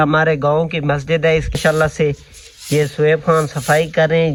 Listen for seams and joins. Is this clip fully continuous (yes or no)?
yes